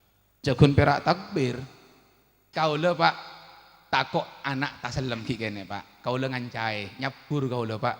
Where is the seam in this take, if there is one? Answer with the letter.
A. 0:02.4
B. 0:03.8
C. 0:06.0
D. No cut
A